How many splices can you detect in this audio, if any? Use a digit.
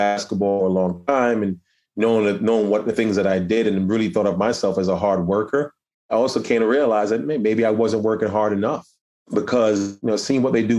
2